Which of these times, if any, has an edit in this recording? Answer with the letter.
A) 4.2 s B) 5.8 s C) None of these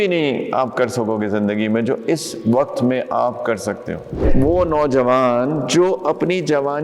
A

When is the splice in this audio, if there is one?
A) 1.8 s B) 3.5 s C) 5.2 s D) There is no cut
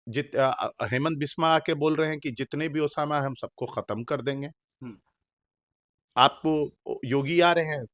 D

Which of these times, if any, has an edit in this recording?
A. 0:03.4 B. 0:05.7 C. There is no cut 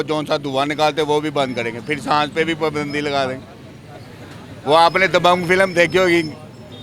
C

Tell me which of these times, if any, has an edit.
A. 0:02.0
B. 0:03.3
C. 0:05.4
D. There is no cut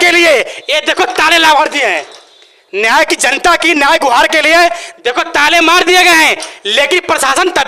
D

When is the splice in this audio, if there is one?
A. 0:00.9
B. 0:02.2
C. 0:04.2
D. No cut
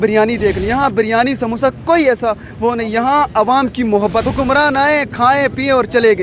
C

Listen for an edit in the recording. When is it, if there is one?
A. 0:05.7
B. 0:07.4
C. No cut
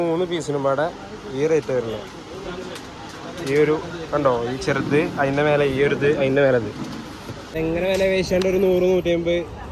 B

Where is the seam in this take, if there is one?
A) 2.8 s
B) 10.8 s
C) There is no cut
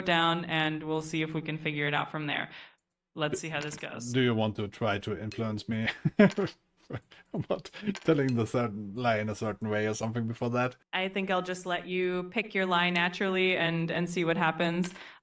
B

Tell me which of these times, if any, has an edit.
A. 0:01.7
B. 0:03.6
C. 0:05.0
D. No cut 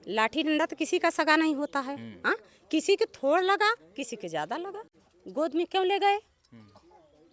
C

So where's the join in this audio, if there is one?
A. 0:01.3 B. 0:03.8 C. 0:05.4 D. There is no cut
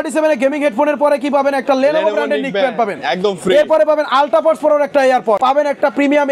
C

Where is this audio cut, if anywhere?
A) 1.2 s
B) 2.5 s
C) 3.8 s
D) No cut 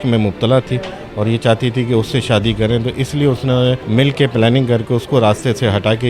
C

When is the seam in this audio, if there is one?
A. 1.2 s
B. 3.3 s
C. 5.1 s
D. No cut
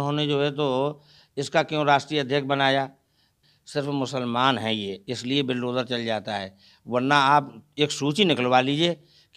B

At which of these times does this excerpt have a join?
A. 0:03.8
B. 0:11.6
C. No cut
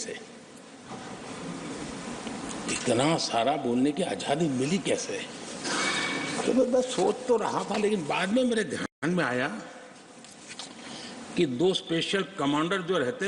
C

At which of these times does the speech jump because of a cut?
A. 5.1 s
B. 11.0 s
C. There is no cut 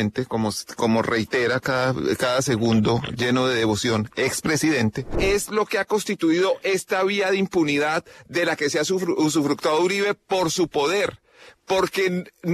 A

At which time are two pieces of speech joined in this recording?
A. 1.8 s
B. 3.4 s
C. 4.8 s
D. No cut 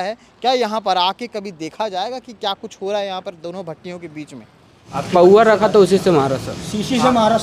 C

